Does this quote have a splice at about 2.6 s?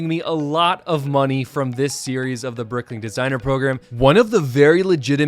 no; 1 cut; at 3.9 s

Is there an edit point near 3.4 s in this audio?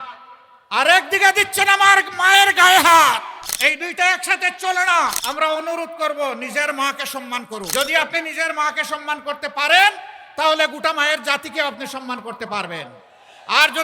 yes; 3 cuts; at 3.4 s, 5.2 s, 7.7 s

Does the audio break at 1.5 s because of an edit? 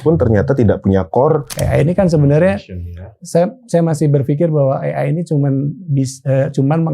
yes; 1 cut; at 1.5 s

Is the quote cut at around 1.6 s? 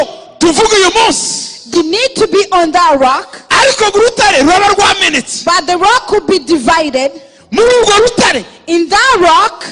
yes; 1 cut; at 1.6 s

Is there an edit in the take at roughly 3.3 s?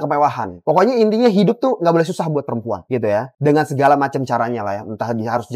no; 0 cuts

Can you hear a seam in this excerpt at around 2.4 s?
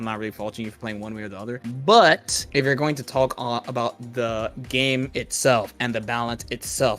yes; 2 cuts; at 1.6 s, 2.4 s

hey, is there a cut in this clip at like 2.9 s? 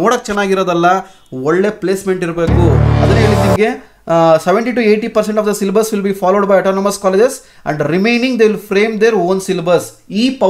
yes; 1 cut; at 2.9 s

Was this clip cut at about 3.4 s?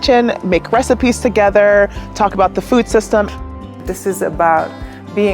yes; 1 cut; at 3.4 s

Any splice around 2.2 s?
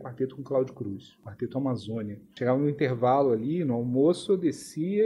yes; 2 cuts; at 1.2 s, 2.2 s

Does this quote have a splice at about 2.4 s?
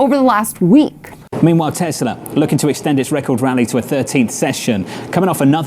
no; 1 cut; at 1.2 s

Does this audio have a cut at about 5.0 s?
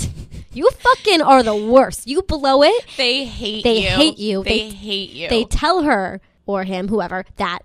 no; 1 cut; at 6.3 s

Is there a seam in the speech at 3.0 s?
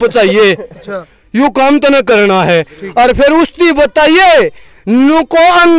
no; 0 cuts

